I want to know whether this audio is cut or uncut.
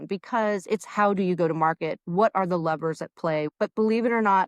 cut